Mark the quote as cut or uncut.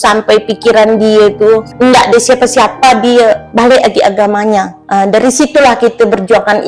cut